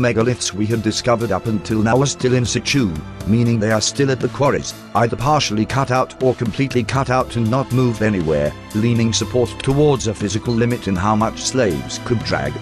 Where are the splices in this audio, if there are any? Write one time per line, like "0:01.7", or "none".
0:08.2